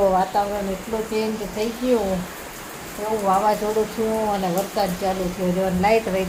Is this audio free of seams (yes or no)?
yes